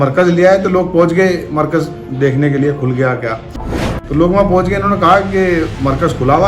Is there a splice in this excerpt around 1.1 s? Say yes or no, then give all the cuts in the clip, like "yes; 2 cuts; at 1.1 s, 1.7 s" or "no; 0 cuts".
no; 1 cut; at 3.6 s